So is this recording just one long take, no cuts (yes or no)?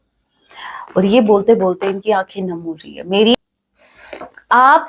no